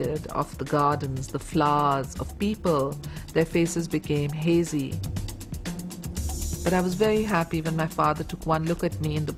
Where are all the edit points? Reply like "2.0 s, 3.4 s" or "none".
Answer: none